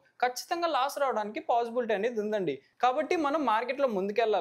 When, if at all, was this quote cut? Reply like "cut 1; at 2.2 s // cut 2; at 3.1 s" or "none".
none